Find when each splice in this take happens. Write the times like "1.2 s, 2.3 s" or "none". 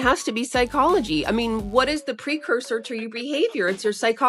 none